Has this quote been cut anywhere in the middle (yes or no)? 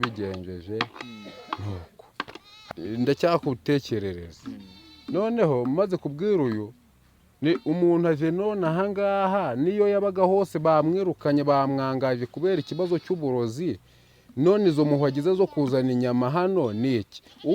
yes